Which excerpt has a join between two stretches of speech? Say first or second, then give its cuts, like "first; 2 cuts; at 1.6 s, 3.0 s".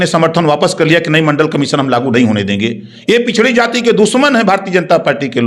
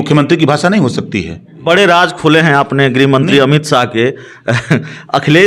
second; 1 cut; at 1.6 s